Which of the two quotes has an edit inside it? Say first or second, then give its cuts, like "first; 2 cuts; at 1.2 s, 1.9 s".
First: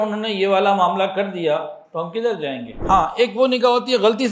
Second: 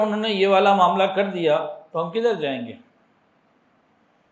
first; 1 cut; at 2.7 s